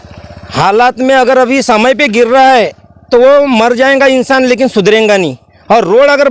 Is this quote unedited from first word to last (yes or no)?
yes